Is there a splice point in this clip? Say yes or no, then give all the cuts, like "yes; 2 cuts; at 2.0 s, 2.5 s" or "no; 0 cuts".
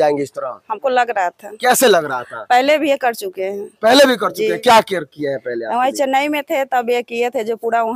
no; 0 cuts